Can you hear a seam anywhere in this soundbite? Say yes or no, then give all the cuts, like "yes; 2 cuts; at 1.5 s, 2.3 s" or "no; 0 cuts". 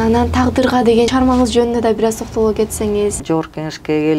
yes; 2 cuts; at 1.1 s, 3.2 s